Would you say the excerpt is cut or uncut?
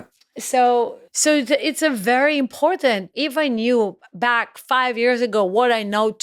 cut